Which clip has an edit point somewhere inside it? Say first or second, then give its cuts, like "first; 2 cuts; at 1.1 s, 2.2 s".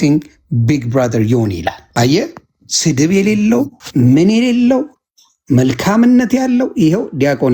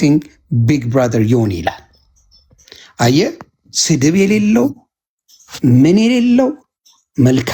first; 2 cuts; at 1.8 s, 3.8 s